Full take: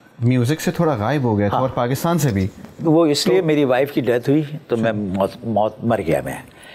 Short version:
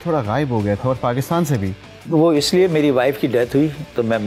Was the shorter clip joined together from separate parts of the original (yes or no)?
no